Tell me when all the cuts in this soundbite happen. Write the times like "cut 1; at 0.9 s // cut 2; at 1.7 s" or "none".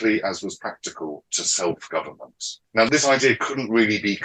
cut 1; at 2.8 s